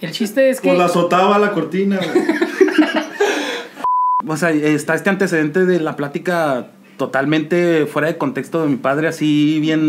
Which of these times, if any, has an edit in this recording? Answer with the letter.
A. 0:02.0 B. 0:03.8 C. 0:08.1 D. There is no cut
B